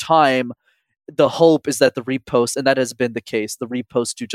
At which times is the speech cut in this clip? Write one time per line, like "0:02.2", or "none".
0:01.0